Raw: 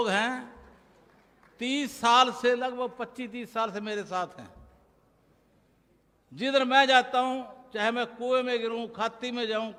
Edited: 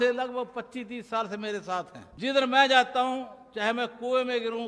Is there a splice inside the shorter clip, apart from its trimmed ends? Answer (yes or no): yes